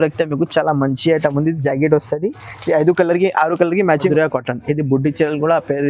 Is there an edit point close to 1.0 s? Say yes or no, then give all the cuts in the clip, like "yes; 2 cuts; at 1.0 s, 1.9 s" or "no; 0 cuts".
no; 1 cut; at 4.0 s